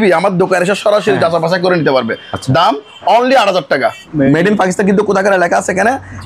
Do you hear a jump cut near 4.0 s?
yes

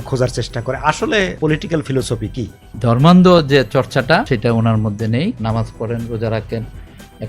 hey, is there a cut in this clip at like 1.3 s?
yes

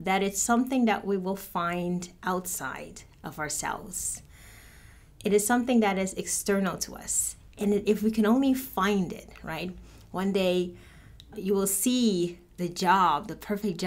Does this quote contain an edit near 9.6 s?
no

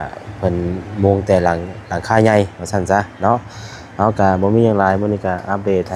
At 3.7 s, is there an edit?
no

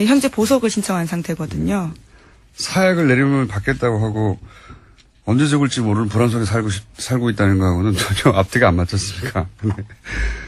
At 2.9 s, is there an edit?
yes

